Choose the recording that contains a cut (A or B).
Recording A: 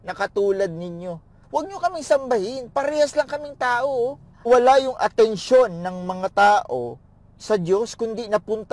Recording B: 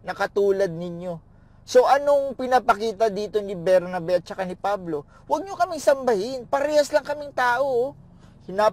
A